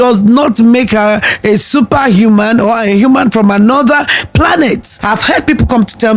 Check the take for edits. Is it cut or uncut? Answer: cut